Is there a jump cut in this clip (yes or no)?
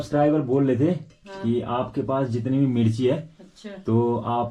no